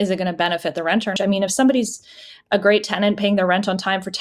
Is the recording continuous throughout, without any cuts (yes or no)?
no